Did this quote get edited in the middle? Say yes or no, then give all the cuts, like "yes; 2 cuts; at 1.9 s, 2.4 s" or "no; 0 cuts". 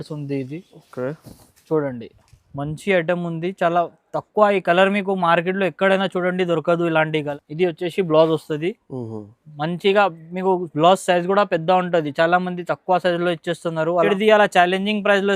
yes; 2 cuts; at 7.4 s, 14.1 s